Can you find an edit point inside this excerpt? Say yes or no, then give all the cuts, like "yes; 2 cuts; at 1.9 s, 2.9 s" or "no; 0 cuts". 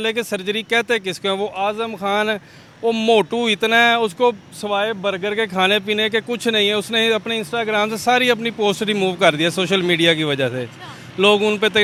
no; 0 cuts